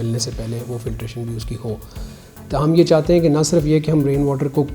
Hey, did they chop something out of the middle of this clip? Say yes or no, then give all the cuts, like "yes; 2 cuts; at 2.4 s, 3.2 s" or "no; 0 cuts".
no; 0 cuts